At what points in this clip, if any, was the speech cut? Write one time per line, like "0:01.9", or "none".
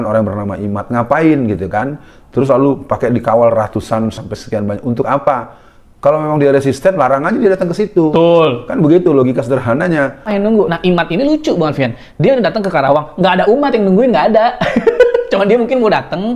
0:10.3